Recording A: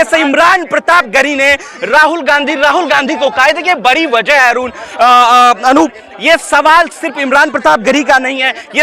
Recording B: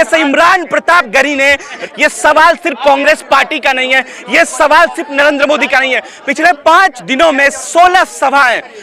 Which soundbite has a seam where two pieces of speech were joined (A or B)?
B